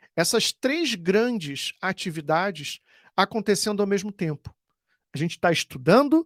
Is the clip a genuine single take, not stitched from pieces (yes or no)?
yes